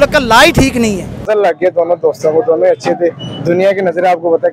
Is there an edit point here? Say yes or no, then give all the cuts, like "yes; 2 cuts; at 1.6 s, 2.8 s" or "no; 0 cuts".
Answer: yes; 1 cut; at 1.2 s